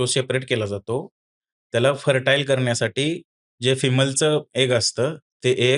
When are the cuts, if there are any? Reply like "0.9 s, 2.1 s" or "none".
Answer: none